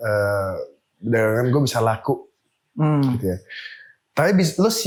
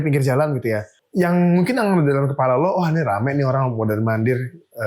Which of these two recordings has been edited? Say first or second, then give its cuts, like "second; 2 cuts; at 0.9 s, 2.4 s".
second; 1 cut; at 0.9 s